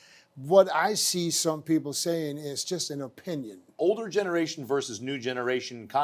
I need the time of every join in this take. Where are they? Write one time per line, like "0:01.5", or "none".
0:03.8